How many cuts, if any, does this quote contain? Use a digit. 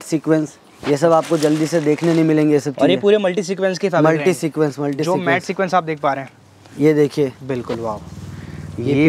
0